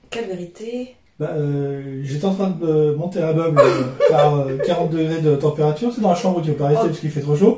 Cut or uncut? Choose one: uncut